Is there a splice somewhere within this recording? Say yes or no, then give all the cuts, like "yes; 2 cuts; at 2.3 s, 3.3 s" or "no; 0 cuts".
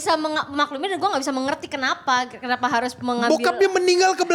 no; 0 cuts